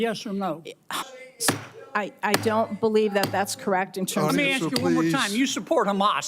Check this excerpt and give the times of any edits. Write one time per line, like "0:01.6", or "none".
0:01.0